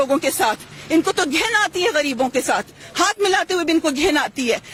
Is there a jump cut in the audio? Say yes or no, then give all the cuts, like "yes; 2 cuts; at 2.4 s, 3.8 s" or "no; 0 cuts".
no; 0 cuts